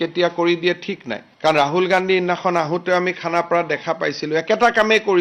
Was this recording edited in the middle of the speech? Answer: no; 0 cuts

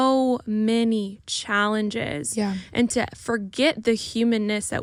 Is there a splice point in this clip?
no; 0 cuts

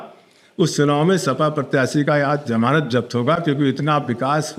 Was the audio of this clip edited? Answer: no; 0 cuts

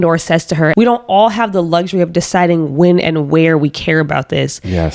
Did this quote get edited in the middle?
no; 0 cuts

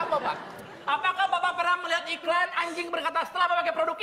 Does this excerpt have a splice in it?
no; 0 cuts

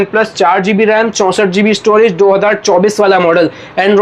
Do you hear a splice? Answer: no; 0 cuts

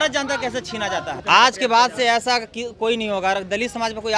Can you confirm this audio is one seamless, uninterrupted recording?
no; 1 cut; at 1.1 s

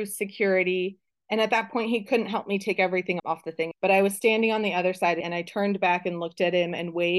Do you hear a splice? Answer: yes; 2 cuts; at 3.2 s, 5.3 s

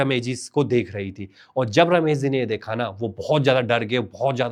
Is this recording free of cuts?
yes; 0 cuts

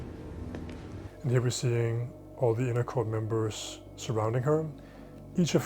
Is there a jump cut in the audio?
yes; 1 cut; at 1.0 s

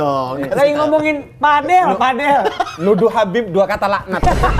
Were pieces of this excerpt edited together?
no; 0 cuts

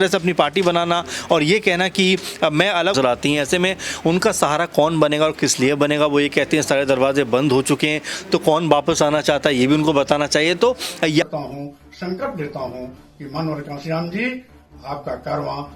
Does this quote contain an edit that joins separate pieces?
yes; 2 cuts; at 2.9 s, 11.3 s

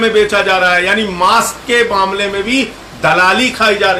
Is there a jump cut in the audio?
no; 0 cuts

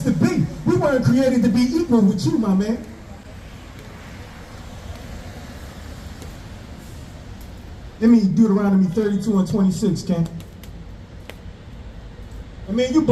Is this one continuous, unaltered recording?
yes; 0 cuts

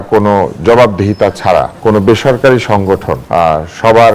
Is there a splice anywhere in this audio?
yes; 2 cuts; at 1.2 s, 3.1 s

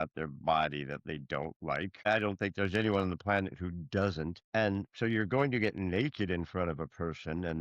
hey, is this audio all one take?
no; 2 cuts; at 2.1 s, 4.4 s

